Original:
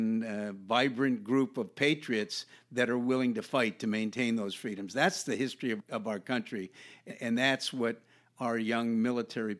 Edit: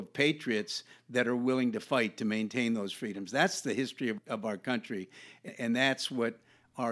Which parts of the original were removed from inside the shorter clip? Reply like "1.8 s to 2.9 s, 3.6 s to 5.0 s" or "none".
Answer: none